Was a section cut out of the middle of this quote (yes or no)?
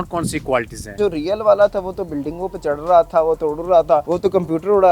yes